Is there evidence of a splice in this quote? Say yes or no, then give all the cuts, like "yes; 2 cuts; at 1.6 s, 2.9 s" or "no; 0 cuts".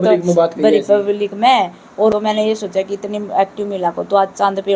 yes; 1 cut; at 2.1 s